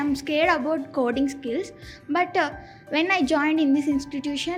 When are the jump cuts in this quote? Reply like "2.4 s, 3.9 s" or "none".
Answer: none